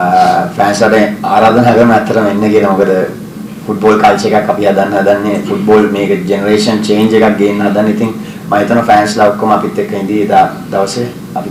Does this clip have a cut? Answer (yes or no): no